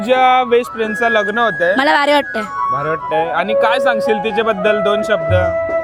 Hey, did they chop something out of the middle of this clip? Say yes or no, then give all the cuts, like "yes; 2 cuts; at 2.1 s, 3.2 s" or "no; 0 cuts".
no; 0 cuts